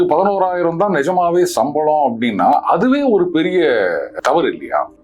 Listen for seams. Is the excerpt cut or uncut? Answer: cut